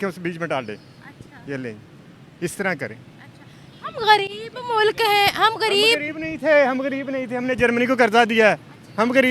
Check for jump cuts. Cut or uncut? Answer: uncut